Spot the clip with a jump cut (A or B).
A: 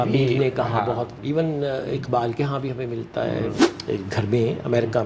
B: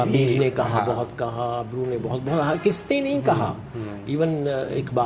A